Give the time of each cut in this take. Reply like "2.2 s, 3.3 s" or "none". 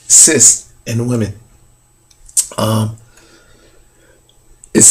2.1 s